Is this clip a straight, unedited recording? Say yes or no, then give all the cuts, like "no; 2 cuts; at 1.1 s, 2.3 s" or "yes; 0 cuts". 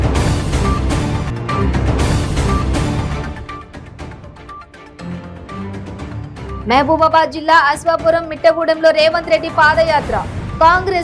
yes; 0 cuts